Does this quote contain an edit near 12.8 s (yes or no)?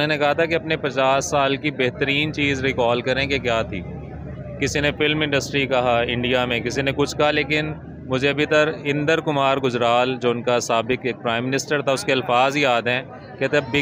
no